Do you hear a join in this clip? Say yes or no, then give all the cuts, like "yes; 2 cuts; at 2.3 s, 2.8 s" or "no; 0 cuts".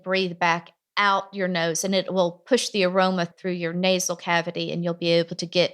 no; 0 cuts